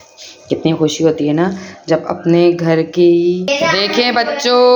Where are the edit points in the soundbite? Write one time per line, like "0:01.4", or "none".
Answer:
0:03.5

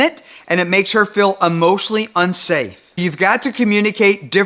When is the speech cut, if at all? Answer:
0:03.0

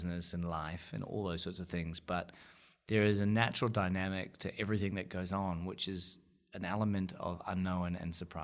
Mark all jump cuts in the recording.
none

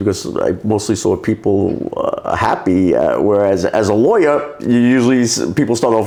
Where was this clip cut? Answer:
none

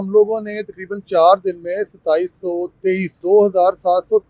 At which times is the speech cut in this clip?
0:03.1

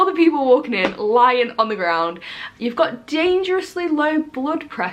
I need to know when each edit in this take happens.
0:02.5

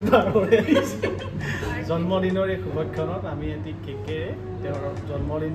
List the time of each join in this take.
none

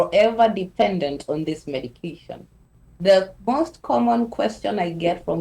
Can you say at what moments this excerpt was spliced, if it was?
0:02.7

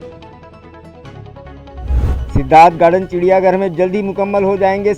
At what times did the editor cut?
0:02.2

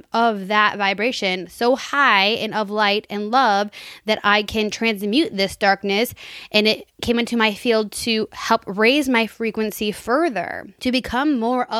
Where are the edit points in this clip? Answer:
0:07.0
0:10.6

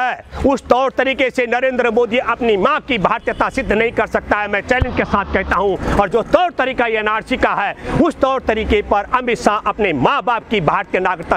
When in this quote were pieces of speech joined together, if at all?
none

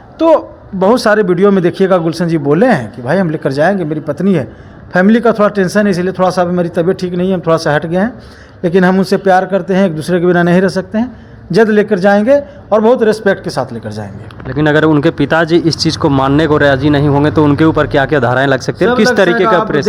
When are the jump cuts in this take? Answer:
none

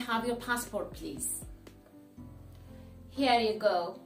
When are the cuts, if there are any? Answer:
0:01.2
0:03.1

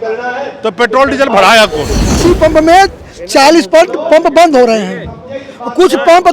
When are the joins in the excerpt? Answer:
0:02.2

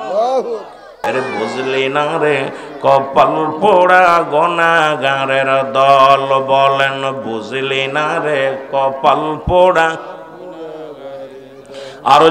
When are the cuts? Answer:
0:01.0

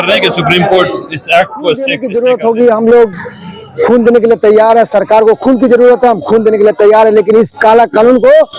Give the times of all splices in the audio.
0:02.0

